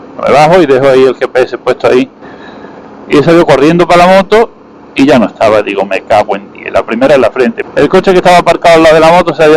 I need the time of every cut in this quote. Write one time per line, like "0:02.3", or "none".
0:07.6